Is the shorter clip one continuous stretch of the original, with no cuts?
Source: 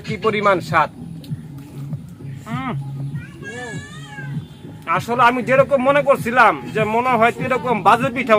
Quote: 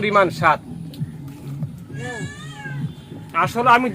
no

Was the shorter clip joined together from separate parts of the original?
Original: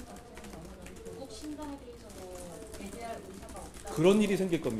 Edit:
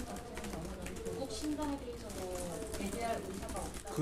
no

